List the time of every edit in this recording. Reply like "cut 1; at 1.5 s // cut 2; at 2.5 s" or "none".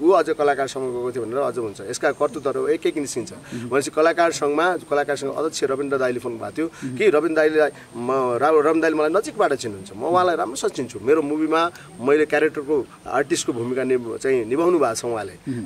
none